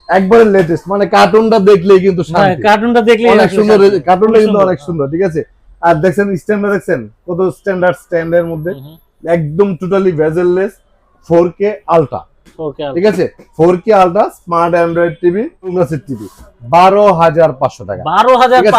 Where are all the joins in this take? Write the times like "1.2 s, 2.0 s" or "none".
15.7 s